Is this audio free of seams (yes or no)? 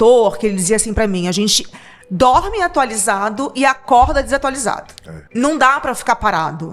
no